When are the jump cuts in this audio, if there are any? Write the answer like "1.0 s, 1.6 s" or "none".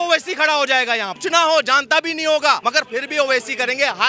1.1 s, 2.6 s

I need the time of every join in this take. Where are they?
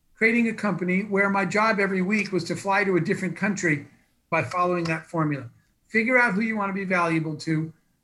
4.3 s

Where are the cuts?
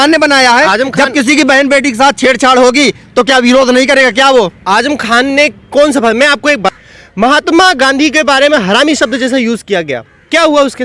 6.7 s

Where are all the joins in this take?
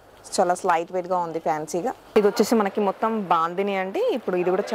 2.1 s

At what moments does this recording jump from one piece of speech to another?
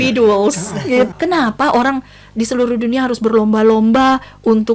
1.1 s

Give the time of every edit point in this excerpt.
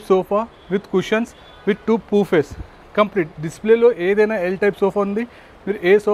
none

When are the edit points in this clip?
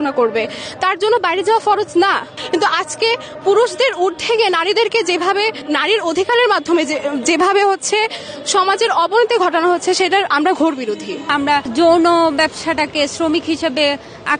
2.4 s, 5.6 s, 11.4 s

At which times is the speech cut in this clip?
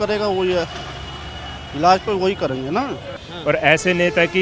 3.2 s

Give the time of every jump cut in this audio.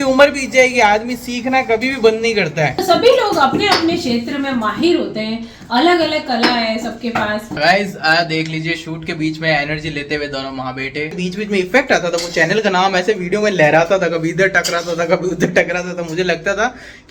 2.8 s, 7.6 s, 11.2 s

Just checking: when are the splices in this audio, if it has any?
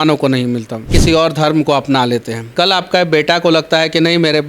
0.9 s, 2.4 s

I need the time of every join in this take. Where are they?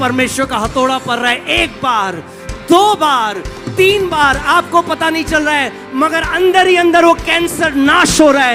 none

